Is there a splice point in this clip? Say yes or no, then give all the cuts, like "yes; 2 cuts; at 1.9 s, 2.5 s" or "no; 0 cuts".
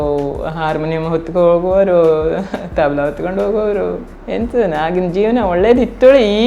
yes; 1 cut; at 4.1 s